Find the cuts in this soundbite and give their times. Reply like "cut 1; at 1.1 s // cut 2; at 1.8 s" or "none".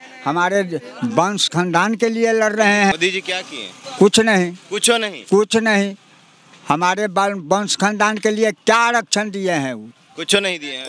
cut 1; at 2.9 s